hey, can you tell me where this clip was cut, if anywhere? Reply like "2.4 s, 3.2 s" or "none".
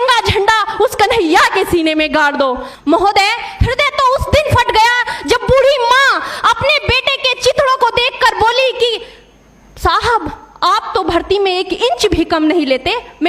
2.7 s